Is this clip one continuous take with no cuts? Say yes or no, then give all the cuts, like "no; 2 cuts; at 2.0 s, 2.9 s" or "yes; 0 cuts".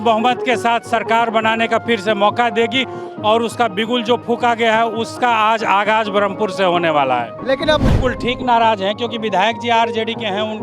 no; 1 cut; at 7.8 s